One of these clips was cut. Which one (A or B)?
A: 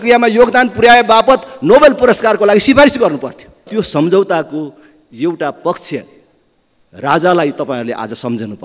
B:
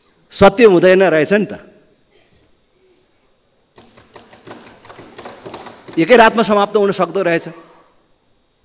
A